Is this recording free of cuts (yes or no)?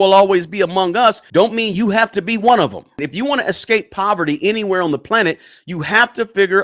no